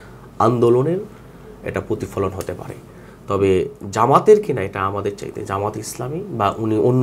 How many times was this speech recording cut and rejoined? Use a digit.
0